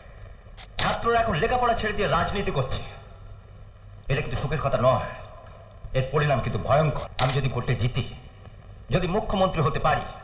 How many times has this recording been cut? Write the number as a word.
one